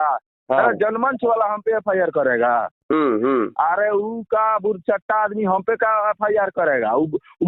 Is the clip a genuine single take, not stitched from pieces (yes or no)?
yes